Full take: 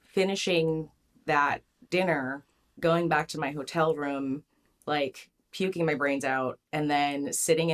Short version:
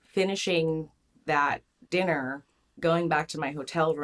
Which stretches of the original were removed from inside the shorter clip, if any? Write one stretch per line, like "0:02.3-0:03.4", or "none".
none